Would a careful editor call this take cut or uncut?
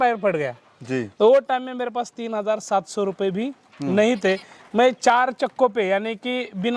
uncut